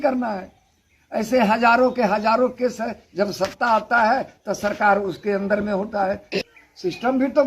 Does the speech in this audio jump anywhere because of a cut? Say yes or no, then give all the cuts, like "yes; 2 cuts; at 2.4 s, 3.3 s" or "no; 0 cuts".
yes; 1 cut; at 6.3 s